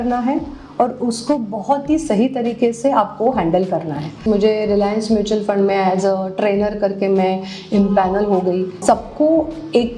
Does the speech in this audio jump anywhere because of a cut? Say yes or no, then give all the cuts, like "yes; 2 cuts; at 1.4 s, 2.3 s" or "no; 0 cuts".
yes; 2 cuts; at 4.2 s, 8.8 s